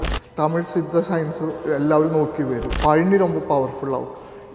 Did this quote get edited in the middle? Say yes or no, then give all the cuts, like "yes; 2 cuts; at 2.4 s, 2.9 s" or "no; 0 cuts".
yes; 1 cut; at 2.6 s